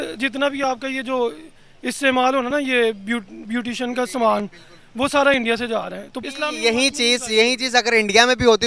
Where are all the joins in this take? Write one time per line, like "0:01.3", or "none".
0:06.2